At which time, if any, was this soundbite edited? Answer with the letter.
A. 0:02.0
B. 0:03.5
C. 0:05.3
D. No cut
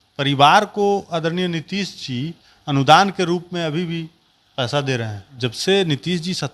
C